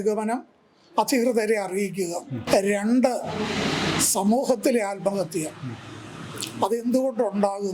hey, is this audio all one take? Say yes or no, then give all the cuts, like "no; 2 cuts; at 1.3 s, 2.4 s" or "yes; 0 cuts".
no; 1 cut; at 2.4 s